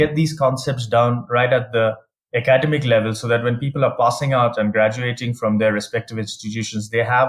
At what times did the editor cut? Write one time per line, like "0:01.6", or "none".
none